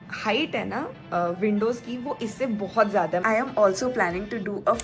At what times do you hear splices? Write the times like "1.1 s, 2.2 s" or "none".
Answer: 3.2 s